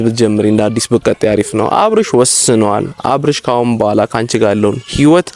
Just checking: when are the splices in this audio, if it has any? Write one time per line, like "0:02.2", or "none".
none